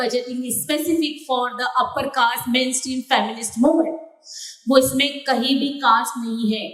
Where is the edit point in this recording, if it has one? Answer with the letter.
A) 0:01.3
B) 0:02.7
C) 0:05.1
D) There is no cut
D